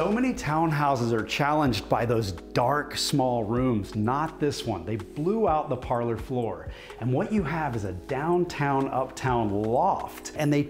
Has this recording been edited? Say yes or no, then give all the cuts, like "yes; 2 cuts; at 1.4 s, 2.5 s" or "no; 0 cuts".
no; 0 cuts